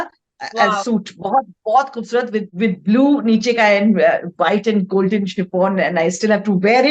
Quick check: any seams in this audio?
yes; 1 cut; at 2.5 s

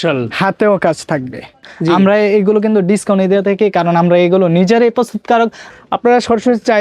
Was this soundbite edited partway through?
yes; 2 cuts; at 1.6 s, 5.6 s

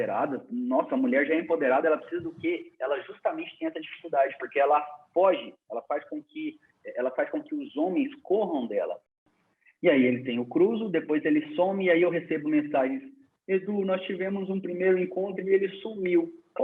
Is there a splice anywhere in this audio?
yes; 1 cut; at 9.3 s

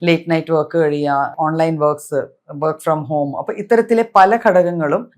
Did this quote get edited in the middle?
yes; 1 cut; at 1.3 s

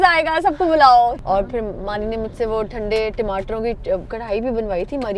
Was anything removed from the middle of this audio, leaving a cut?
yes; 2 cuts; at 1.2 s, 4.2 s

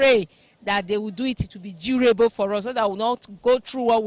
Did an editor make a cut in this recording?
no; 0 cuts

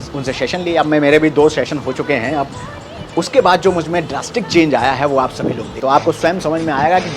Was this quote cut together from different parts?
yes; 1 cut; at 6.2 s

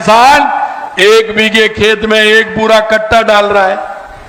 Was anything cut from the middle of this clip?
no; 0 cuts

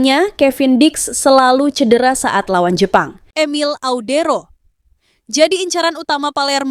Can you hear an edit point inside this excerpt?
yes; 1 cut; at 3.2 s

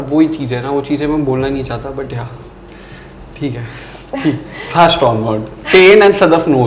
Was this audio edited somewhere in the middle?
no; 0 cuts

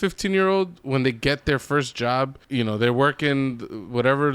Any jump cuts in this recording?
yes; 1 cut; at 2.4 s

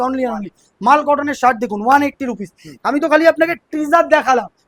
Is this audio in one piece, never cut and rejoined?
yes; 0 cuts

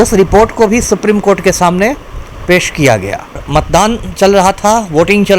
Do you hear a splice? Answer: yes; 1 cut; at 3.4 s

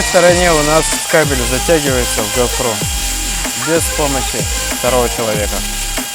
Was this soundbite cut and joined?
no; 0 cuts

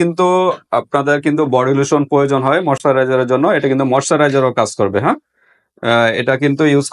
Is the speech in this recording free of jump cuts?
yes; 0 cuts

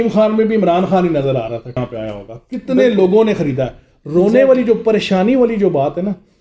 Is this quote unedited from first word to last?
no; 1 cut; at 1.8 s

